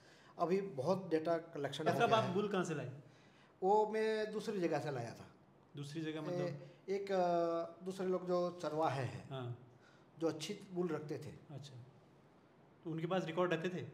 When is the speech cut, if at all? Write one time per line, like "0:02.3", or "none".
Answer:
0:01.9